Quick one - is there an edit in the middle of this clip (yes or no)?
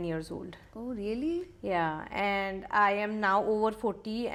no